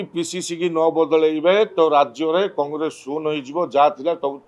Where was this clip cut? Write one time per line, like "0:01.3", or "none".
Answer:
none